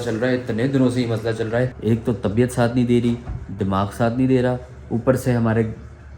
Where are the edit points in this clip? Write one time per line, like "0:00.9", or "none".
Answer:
0:01.7